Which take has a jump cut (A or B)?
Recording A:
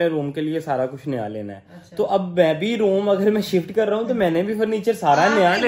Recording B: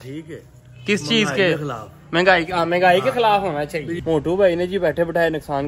B